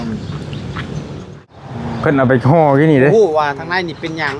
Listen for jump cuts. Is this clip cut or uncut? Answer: cut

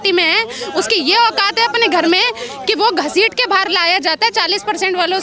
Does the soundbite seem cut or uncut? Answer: uncut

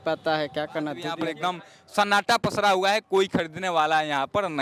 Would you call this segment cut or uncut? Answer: cut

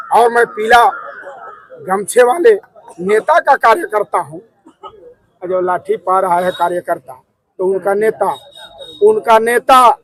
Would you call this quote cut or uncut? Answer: uncut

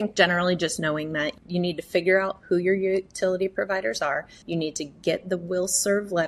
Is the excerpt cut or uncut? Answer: cut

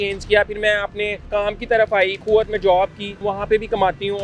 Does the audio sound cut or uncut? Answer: cut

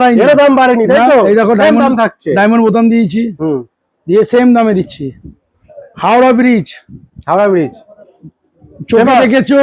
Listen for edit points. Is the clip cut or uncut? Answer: uncut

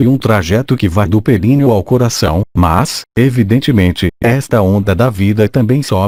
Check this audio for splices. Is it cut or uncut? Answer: uncut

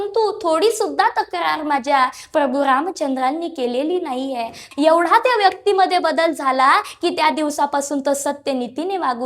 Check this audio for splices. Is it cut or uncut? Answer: cut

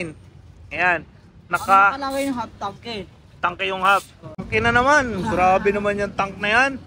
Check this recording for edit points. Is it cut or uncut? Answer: cut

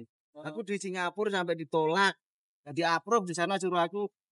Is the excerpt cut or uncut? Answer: cut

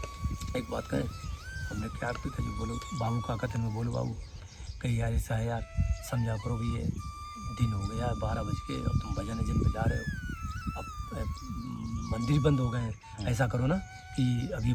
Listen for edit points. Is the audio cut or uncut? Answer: uncut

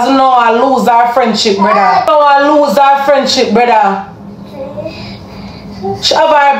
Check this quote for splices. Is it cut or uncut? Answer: cut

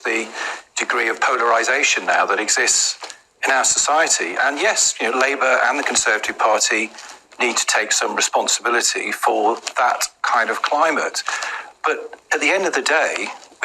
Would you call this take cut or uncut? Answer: cut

